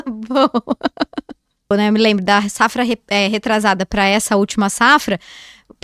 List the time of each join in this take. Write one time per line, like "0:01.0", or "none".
0:01.7